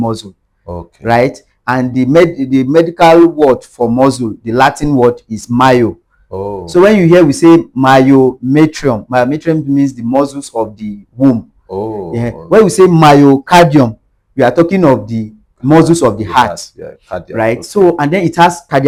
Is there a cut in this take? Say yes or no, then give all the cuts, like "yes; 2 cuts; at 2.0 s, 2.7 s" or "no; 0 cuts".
no; 0 cuts